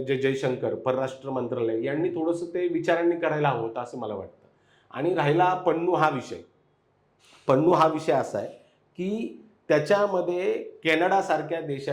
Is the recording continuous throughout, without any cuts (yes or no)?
yes